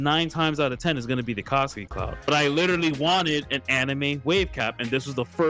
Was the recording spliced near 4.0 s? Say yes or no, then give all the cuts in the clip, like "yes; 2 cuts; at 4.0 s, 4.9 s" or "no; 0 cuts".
no; 1 cut; at 2.3 s